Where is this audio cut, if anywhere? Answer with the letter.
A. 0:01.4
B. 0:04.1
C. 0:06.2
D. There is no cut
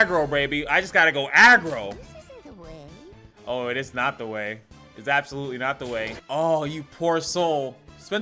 C